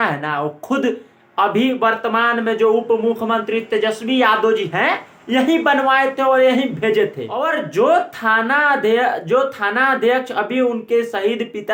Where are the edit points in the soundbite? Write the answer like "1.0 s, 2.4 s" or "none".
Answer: none